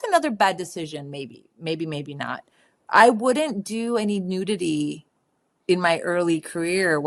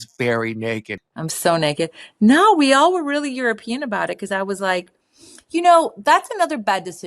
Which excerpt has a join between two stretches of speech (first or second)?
second